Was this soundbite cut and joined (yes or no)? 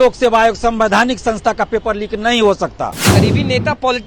yes